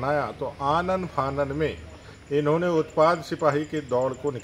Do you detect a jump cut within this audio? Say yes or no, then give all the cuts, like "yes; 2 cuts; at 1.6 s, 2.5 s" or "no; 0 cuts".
no; 0 cuts